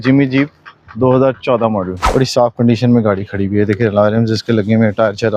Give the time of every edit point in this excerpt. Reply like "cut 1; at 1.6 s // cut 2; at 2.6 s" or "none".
cut 1; at 2.0 s